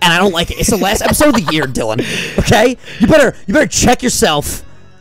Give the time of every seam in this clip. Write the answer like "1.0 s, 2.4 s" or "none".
none